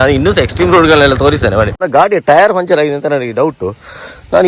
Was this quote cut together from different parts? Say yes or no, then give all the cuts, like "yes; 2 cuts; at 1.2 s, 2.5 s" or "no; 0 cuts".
yes; 1 cut; at 1.8 s